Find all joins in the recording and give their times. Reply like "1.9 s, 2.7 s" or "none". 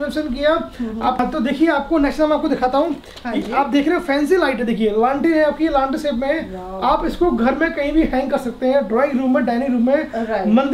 1.2 s